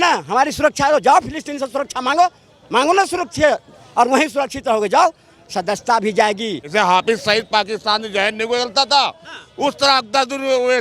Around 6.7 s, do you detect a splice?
yes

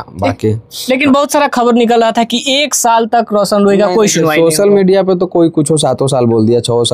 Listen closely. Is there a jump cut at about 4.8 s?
no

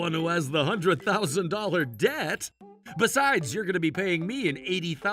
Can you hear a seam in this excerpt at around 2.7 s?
yes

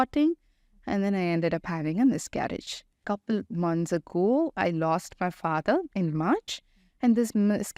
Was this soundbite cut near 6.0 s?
no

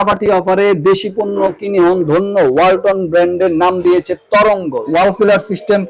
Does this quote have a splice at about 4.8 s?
yes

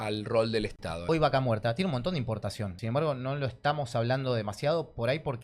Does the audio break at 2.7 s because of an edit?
yes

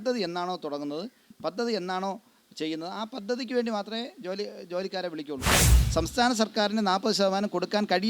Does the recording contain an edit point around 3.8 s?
no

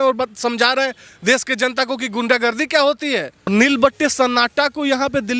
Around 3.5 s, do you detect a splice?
yes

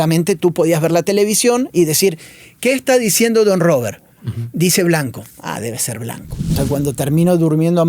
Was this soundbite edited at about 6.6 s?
yes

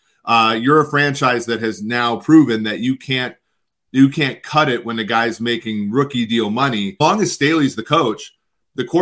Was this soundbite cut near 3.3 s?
no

